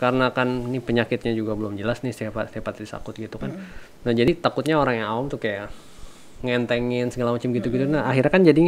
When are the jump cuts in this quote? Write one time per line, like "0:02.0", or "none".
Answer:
0:04.3